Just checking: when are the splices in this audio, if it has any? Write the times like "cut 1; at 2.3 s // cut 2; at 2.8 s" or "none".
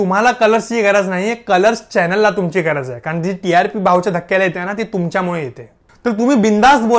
none